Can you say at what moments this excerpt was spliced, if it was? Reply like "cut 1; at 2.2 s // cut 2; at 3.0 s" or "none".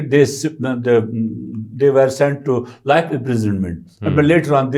none